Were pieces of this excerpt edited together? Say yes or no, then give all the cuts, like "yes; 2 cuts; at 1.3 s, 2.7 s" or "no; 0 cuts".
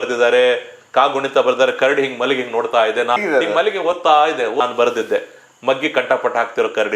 yes; 2 cuts; at 3.2 s, 4.6 s